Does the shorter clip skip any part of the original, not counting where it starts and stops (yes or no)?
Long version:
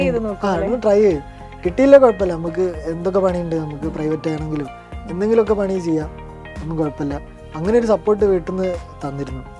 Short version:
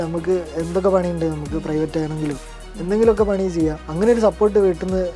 yes